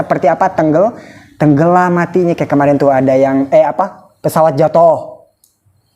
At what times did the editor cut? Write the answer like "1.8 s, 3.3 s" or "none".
none